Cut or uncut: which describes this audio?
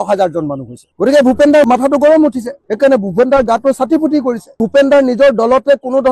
cut